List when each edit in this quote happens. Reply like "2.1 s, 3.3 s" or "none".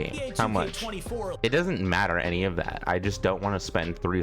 1.3 s